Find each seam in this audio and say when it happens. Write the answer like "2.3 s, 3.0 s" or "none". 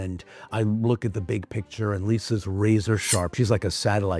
3.3 s